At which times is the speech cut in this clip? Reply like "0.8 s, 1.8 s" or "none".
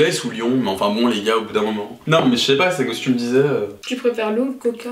2.0 s